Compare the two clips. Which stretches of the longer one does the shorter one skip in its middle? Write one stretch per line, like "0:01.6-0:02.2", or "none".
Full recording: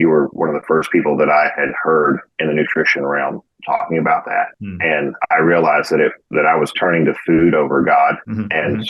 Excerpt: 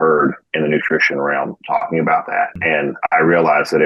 0:03.4-0:03.6
0:04.6-0:04.8

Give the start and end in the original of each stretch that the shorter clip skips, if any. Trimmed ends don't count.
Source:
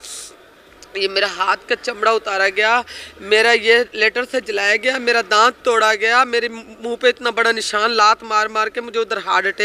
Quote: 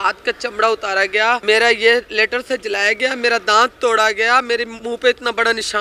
0:02.8-0:03.2
0:06.6-0:06.7

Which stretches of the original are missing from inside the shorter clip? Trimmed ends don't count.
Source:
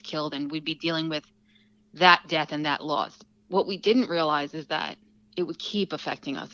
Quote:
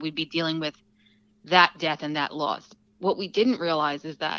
none

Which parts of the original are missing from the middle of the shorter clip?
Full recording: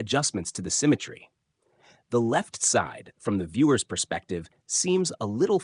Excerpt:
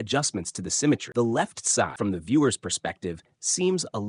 0:01.1-0:02.0
0:02.9-0:03.2

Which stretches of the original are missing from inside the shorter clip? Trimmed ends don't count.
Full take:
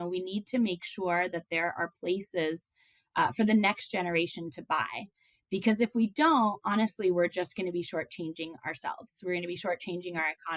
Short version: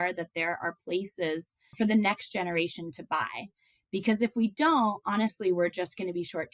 0:02.9-0:03.3

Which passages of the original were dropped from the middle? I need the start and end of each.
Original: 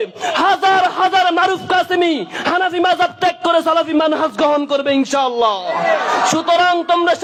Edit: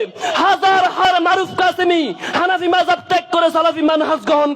0:01.0-0:01.2

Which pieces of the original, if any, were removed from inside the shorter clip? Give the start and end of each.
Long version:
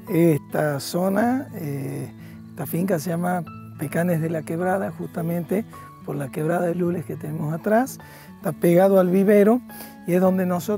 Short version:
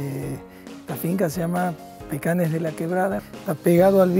0:05.0-0:08.3

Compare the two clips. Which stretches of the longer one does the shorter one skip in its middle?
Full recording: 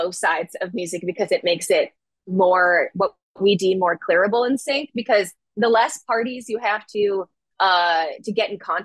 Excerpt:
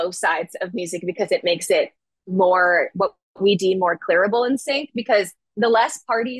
none

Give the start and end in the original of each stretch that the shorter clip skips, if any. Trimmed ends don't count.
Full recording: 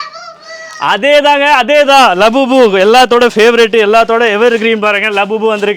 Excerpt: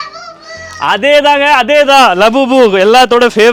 none

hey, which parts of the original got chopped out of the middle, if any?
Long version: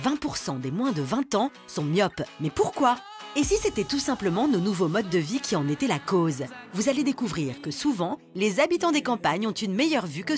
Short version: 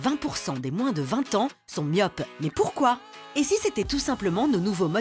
none

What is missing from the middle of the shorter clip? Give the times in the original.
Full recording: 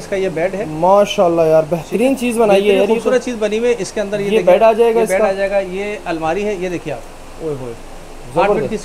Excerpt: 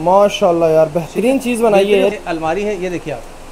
0:02.9-0:05.9

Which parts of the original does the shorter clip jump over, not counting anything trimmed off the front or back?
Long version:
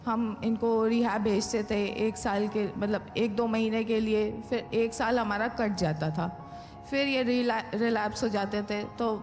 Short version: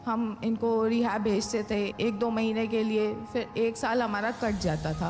0:01.9-0:03.1

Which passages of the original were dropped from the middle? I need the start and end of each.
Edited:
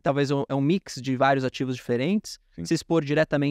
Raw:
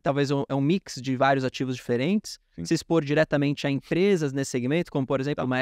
none

